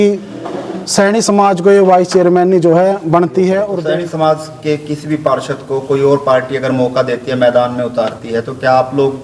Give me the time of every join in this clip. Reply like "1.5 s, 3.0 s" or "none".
3.7 s